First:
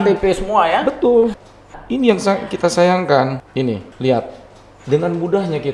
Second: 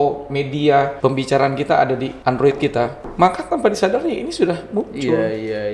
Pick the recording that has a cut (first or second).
second